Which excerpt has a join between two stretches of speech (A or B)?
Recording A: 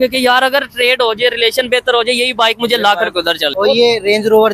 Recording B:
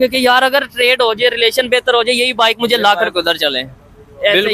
A